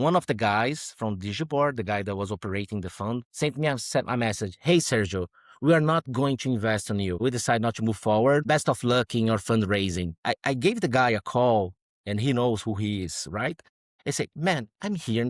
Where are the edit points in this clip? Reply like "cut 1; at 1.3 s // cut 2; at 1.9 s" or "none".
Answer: none